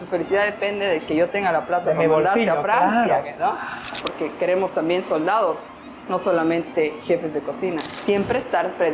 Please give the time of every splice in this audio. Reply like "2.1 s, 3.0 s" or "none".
4.0 s, 7.9 s